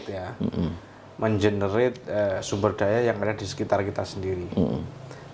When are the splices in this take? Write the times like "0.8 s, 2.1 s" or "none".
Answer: none

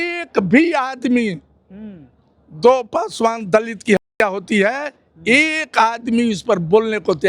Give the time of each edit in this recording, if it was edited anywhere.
none

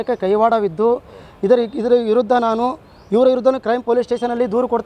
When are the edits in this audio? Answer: none

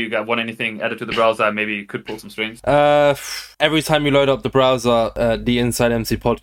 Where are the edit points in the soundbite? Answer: none

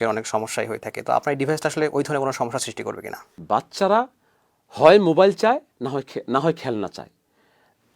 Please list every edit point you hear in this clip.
3.4 s

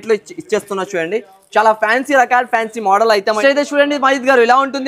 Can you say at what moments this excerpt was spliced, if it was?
3.4 s

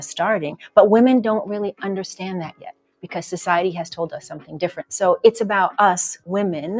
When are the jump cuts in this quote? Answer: 2.6 s, 4.8 s

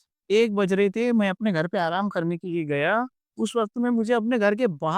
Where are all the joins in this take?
none

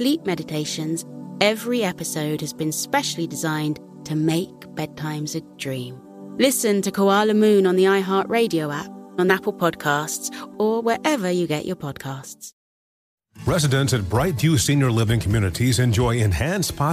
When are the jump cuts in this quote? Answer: 13.0 s

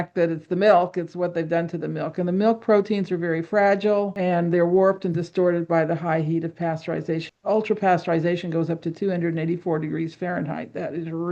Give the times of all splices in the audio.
4.1 s

